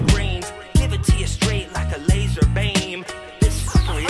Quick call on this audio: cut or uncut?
uncut